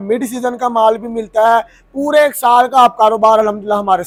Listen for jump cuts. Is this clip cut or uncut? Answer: uncut